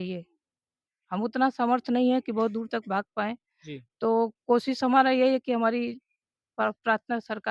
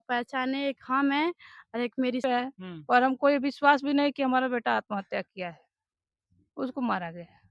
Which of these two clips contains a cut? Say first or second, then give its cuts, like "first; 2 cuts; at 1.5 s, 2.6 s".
second; 1 cut; at 2.2 s